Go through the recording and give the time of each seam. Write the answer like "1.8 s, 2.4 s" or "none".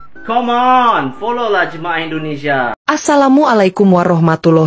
2.8 s